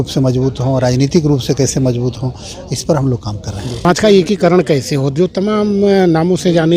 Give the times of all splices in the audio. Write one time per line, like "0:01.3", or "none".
0:03.9